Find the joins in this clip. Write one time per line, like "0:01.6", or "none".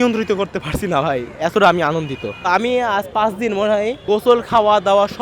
0:02.5
0:04.0